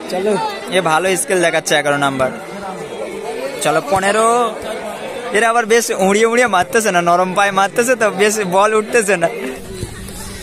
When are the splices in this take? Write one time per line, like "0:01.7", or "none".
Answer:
0:09.4